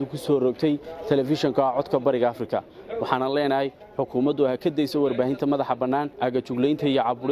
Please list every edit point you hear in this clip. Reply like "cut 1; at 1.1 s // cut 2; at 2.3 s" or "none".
cut 1; at 6.1 s